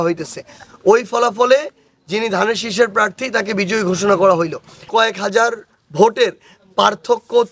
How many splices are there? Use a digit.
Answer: 1